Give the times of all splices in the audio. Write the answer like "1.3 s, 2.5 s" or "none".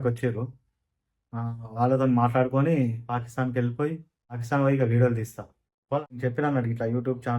4.4 s, 6.0 s